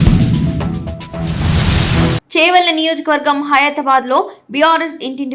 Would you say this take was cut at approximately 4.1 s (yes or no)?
no